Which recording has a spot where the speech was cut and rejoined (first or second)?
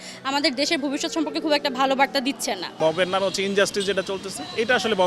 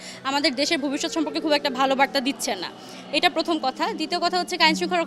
first